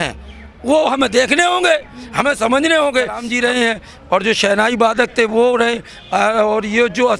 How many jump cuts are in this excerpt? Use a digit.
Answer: 1